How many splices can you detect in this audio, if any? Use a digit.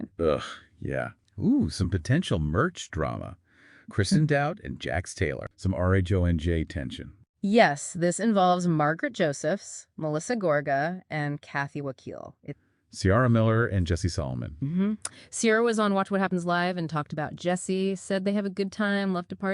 3